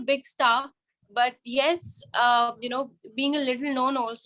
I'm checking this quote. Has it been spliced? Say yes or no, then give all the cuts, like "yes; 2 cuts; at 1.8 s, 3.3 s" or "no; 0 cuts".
no; 0 cuts